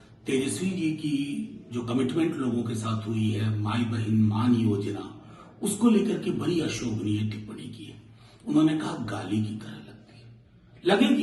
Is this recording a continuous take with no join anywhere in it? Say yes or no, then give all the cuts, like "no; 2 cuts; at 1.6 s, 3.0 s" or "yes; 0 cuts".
yes; 0 cuts